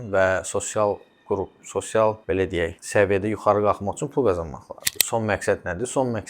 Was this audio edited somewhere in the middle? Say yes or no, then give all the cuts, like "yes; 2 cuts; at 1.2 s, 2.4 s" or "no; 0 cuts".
yes; 1 cut; at 4.8 s